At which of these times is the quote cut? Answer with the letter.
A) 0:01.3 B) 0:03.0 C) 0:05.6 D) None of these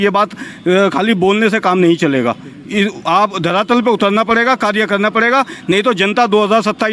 D